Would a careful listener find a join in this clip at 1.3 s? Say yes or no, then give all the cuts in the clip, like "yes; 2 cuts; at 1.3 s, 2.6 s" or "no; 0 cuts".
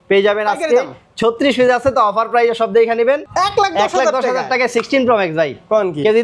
no; 1 cut; at 3.3 s